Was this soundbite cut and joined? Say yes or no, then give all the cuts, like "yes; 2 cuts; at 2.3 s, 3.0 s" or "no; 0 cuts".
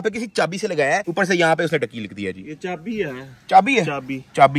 no; 0 cuts